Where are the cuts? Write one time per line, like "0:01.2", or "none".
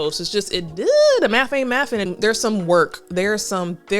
0:02.1